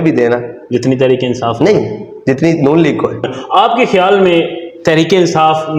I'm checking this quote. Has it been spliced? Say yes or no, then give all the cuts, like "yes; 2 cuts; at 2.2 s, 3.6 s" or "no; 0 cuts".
yes; 1 cut; at 3.4 s